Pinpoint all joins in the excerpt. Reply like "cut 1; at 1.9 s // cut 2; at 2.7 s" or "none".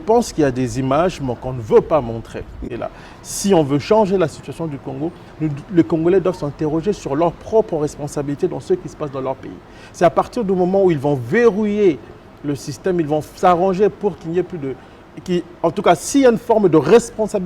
cut 1; at 2.6 s

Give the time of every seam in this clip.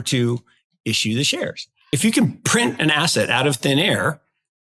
cut 1; at 1.9 s

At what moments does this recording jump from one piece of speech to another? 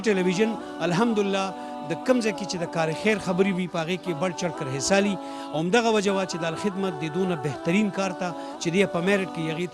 none

